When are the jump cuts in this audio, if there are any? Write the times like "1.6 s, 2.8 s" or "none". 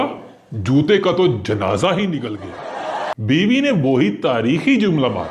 3.1 s